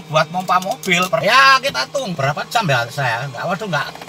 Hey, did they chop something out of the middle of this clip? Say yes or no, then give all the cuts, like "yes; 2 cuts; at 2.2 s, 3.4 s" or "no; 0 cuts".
yes; 2 cuts; at 1.2 s, 2.1 s